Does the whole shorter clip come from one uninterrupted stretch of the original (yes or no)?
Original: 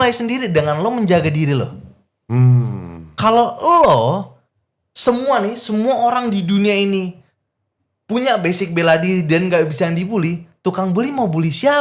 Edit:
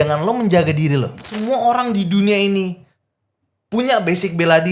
no